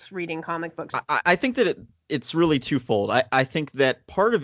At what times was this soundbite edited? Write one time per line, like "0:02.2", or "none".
0:01.0